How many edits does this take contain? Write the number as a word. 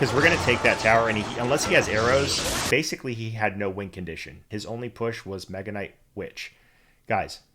two